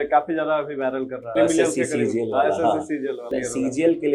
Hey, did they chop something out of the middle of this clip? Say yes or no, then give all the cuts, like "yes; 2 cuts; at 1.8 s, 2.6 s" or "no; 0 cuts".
yes; 2 cuts; at 1.2 s, 3.3 s